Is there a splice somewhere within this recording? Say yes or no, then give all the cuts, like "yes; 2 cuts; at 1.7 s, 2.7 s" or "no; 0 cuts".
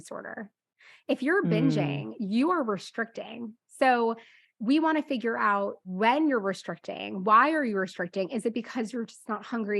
yes; 1 cut; at 5.8 s